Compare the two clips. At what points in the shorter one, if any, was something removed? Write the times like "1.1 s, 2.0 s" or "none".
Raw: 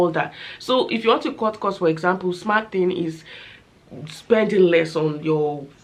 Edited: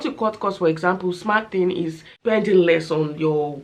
2.1 s